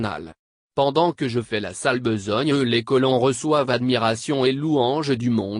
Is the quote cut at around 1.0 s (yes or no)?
yes